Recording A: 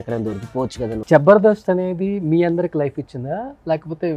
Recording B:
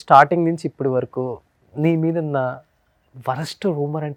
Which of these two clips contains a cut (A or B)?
A